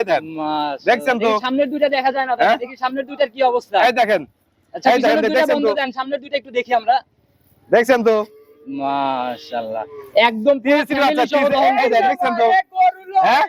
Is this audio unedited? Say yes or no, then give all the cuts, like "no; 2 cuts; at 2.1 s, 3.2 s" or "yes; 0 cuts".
yes; 0 cuts